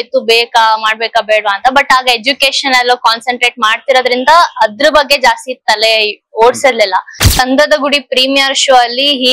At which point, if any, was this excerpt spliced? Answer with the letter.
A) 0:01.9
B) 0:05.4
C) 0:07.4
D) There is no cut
C